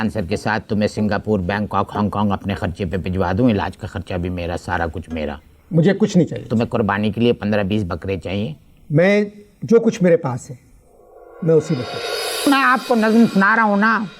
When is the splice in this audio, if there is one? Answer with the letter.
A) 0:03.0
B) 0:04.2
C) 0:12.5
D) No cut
C